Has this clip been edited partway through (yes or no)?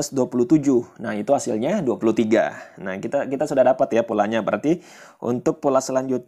no